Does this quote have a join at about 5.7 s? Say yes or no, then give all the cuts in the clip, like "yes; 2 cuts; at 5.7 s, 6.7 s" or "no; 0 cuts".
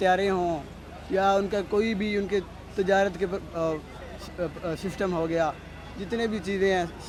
no; 0 cuts